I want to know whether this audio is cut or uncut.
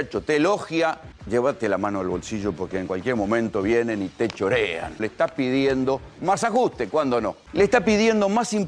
cut